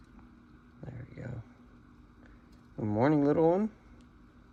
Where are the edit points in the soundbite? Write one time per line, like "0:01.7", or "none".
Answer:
none